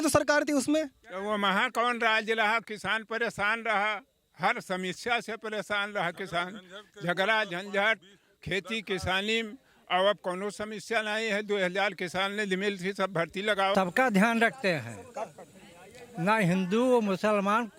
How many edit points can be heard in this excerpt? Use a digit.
1